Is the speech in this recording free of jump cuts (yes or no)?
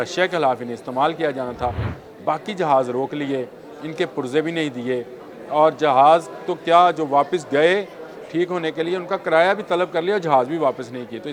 yes